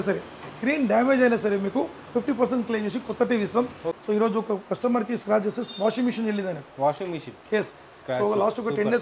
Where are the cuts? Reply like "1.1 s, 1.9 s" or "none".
3.9 s